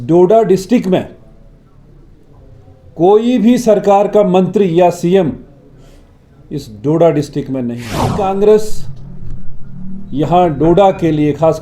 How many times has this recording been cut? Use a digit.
1